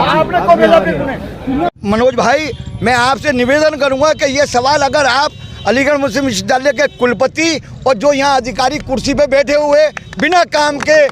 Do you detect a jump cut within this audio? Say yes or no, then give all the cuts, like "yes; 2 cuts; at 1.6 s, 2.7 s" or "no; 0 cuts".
yes; 1 cut; at 1.7 s